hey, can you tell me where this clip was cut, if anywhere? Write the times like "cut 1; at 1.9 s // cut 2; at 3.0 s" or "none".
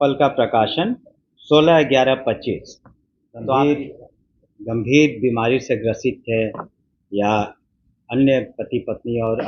cut 1; at 3.6 s